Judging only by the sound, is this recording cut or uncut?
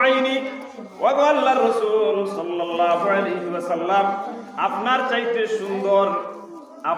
uncut